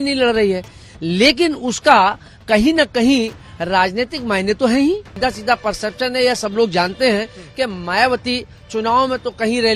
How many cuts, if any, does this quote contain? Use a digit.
1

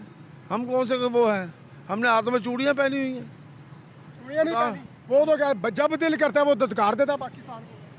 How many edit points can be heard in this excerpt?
0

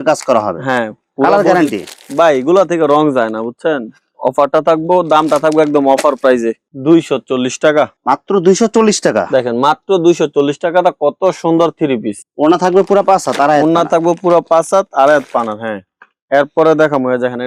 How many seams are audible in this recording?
0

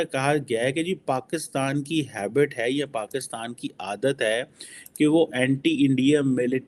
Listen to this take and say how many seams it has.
0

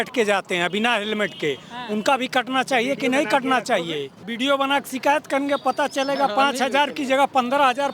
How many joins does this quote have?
1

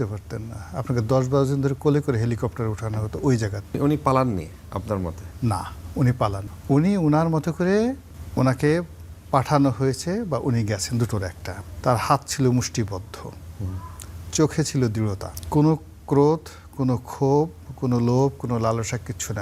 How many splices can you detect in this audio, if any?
5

